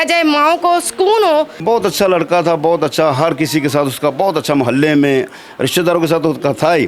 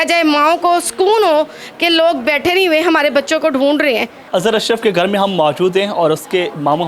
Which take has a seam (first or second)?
first